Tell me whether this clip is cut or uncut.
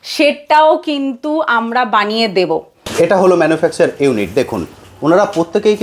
cut